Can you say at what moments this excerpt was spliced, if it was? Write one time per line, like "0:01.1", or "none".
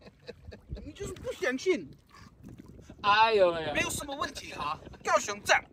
none